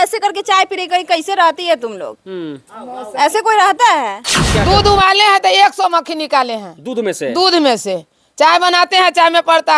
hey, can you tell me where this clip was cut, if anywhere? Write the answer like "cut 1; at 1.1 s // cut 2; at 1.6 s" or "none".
cut 1; at 4.4 s